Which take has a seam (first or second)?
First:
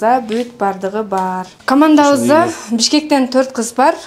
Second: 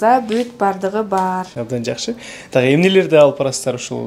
second